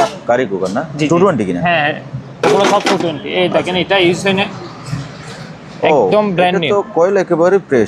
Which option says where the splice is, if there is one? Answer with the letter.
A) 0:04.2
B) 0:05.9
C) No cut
C